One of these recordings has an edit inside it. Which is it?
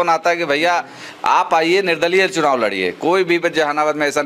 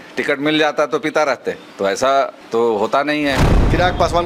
second; 3 cuts; at 1.7 s, 2.4 s, 3.4 s

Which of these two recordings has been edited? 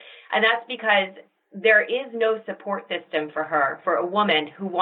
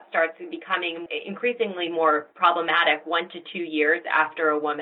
second; 1 cut; at 1.0 s

